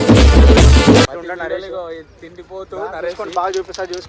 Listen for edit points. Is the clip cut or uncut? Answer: cut